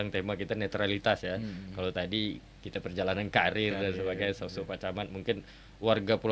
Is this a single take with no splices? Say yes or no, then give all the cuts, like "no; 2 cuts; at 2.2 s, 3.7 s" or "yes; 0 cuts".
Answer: yes; 0 cuts